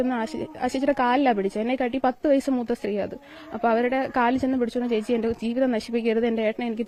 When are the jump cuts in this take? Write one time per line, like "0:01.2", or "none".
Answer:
none